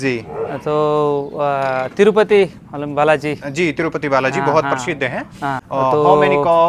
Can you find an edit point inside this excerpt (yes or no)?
yes